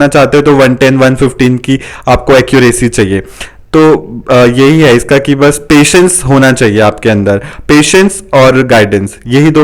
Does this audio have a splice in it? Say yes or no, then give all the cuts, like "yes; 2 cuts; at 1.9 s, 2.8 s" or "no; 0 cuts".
no; 0 cuts